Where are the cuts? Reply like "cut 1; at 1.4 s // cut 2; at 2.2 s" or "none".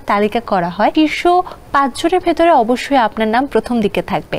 cut 1; at 0.9 s